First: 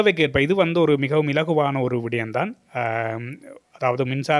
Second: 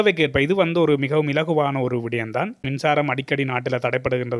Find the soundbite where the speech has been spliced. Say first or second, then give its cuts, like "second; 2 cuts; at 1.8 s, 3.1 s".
second; 1 cut; at 2.7 s